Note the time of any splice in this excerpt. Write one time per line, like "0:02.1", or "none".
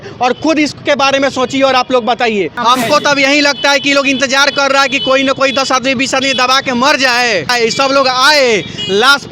0:02.5
0:07.5